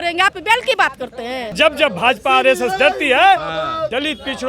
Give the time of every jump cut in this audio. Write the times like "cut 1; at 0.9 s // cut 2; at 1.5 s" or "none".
cut 1; at 1.5 s